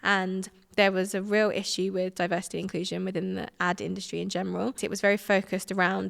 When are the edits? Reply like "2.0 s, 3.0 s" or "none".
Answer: 4.8 s

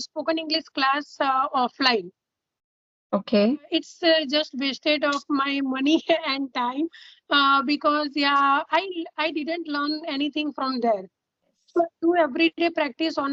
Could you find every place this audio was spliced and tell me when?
3.7 s, 11.6 s

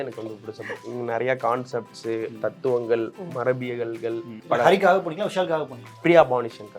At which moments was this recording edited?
4.3 s

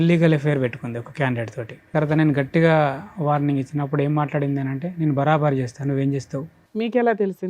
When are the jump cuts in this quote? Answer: 1.9 s, 6.6 s

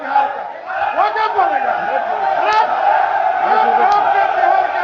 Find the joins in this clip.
none

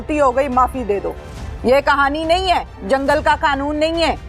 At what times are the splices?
none

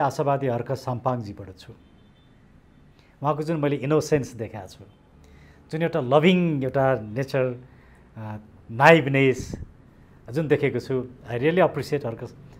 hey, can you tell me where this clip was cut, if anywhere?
none

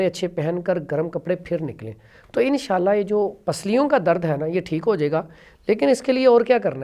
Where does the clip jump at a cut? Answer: none

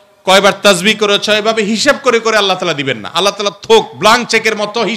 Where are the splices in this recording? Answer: none

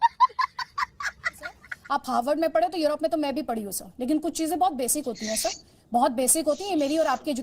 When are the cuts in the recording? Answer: 1.7 s

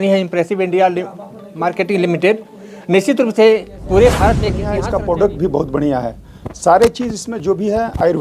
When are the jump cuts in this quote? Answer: 4.7 s

